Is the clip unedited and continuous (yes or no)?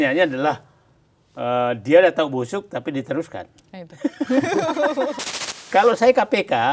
no